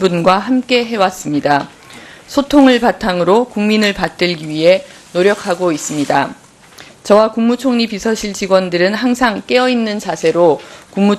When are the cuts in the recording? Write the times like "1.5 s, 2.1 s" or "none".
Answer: none